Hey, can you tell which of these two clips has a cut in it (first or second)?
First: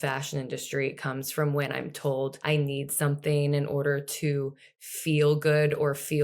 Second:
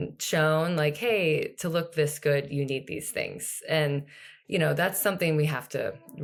first